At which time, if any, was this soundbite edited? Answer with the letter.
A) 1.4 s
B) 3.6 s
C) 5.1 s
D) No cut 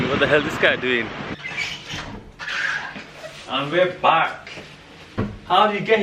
A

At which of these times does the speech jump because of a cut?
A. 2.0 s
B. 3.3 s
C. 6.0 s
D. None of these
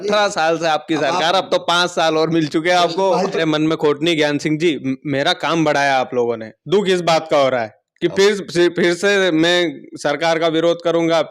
B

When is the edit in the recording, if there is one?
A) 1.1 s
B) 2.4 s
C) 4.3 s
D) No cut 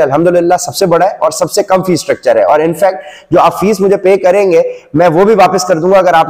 D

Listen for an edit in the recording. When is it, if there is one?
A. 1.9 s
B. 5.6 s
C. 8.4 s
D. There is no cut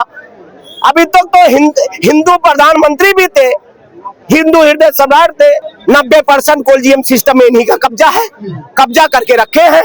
B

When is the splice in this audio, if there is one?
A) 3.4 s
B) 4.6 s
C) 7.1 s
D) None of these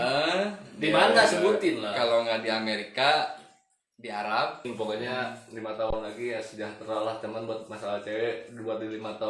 B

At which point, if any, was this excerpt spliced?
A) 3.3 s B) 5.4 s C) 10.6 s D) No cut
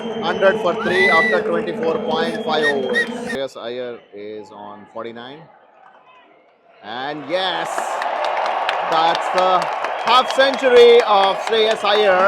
A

